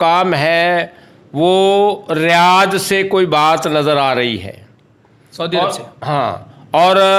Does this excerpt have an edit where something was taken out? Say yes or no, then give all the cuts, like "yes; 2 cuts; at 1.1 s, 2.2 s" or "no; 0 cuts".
no; 0 cuts